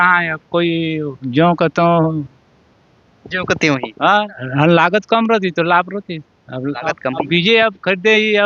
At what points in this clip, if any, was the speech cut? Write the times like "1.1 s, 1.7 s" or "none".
4.4 s